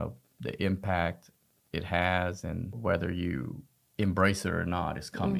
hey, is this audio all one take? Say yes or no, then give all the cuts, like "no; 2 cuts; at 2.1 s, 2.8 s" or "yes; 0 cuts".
no; 1 cut; at 2.8 s